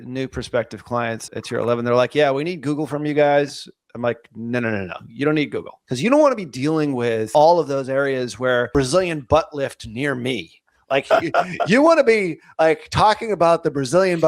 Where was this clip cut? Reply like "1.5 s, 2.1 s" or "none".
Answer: 1.2 s, 5.8 s, 7.3 s, 8.7 s